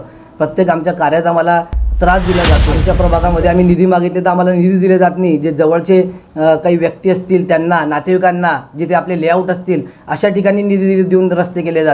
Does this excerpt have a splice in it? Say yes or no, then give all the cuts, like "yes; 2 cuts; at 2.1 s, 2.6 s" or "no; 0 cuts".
yes; 1 cut; at 2.8 s